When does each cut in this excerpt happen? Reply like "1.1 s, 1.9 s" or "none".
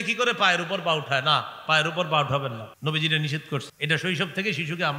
2.7 s, 3.7 s